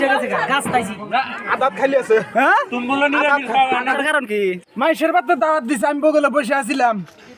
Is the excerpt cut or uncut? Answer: cut